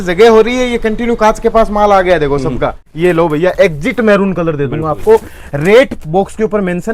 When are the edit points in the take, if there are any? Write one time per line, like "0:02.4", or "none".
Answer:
0:02.8